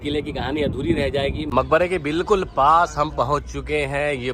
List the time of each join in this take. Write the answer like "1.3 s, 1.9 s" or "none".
1.5 s